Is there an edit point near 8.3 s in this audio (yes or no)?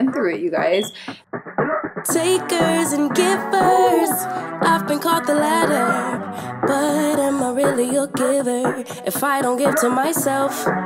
no